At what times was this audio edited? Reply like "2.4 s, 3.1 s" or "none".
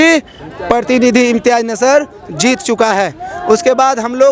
none